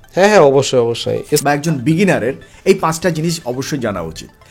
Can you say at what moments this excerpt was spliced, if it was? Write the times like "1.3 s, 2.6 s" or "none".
1.4 s

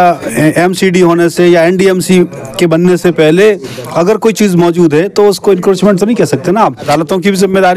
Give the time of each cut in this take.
6.9 s

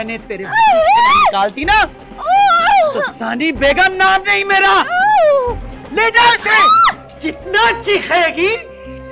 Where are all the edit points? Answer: 7.1 s

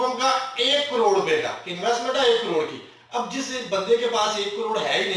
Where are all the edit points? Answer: none

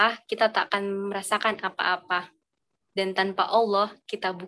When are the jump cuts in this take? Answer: none

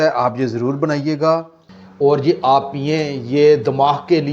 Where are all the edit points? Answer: 1.6 s

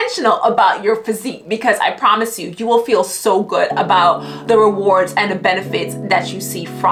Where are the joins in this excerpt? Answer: none

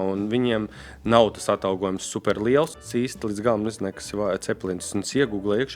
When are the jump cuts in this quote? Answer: 2.8 s

